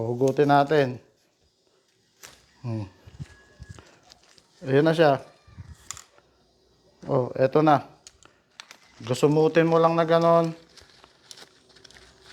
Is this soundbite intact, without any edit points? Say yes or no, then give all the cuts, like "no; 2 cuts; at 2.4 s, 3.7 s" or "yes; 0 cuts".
yes; 0 cuts